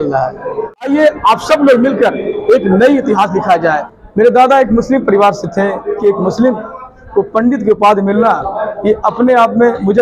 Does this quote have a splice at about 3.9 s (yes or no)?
yes